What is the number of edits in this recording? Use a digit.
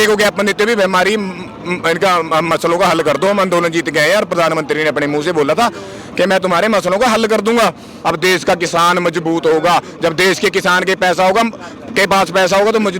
1